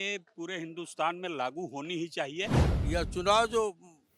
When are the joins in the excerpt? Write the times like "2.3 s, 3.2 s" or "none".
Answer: 2.7 s